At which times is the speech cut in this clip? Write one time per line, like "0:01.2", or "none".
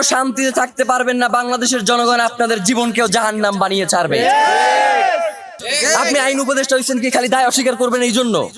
0:05.6

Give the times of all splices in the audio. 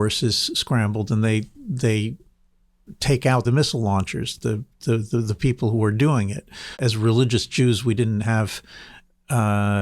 0:03.4
0:06.8

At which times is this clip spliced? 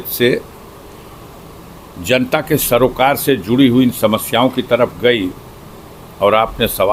none

